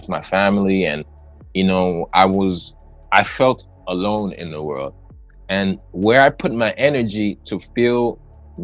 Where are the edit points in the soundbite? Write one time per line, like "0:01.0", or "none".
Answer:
none